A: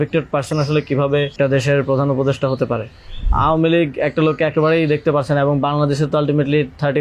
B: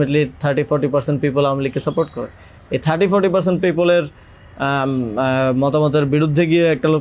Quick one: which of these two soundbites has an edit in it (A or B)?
A